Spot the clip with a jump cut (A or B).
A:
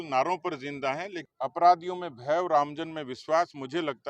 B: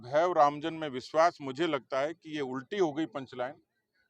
A